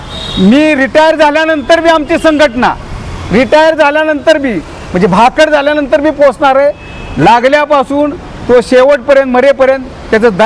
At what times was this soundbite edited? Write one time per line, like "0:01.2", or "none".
none

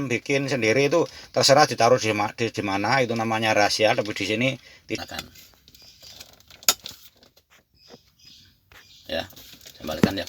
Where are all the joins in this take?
0:05.0

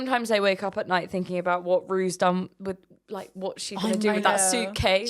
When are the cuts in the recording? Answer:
none

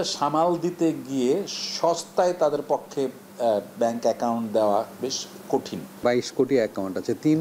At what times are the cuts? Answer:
0:05.9

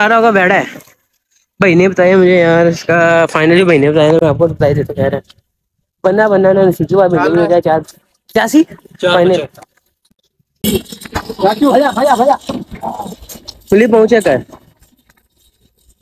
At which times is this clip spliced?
0:10.6

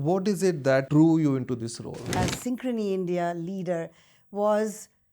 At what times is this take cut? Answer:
0:00.9
0:02.2

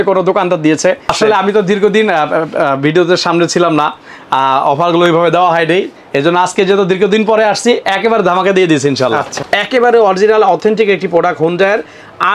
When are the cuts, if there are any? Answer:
0:01.1
0:09.4

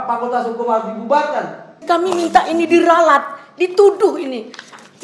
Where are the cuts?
0:01.8

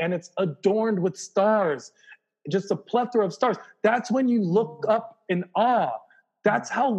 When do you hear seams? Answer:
none

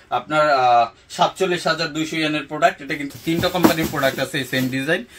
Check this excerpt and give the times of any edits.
0:03.0

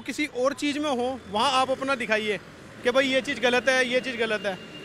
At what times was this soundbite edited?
none

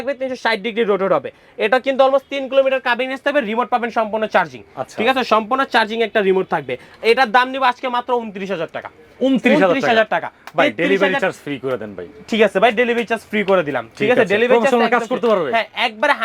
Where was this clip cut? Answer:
none

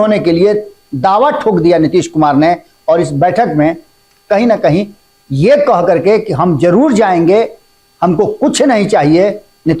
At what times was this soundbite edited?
none

